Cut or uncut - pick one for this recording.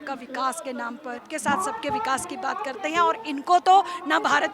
cut